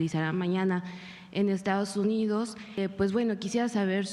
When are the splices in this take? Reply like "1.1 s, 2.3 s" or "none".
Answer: 2.8 s